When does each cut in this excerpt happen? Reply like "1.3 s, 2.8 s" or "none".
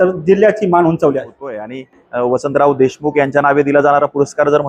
1.7 s